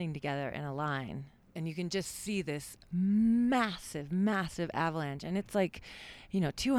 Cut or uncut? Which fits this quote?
cut